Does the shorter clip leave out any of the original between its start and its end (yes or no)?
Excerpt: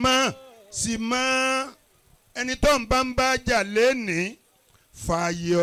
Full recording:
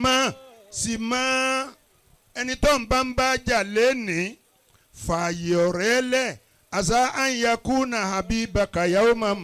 no